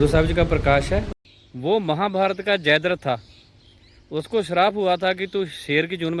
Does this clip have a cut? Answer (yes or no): yes